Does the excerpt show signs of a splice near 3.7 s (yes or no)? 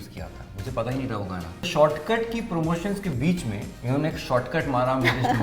yes